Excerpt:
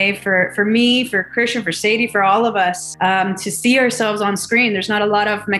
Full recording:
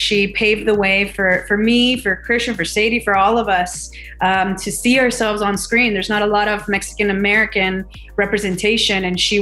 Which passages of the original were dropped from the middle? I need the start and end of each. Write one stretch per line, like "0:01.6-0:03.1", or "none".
0:03.8-0:04.1